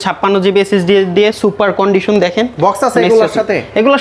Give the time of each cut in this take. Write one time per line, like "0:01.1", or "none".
none